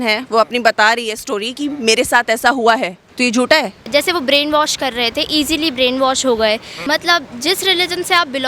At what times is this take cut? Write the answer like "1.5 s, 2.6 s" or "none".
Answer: 3.0 s, 3.8 s, 6.7 s